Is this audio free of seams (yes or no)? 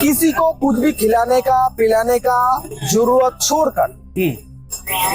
yes